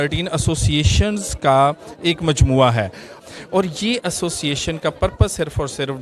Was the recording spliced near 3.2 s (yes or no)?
yes